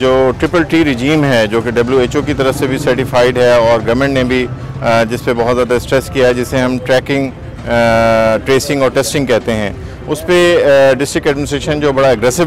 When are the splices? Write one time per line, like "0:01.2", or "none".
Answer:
none